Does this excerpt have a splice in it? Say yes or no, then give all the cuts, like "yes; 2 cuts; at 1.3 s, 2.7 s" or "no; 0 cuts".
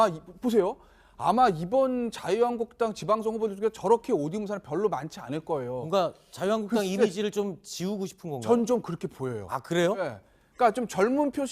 yes; 1 cut; at 5.1 s